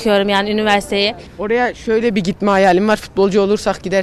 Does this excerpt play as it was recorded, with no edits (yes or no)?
no